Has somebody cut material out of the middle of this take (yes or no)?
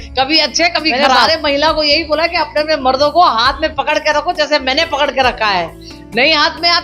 yes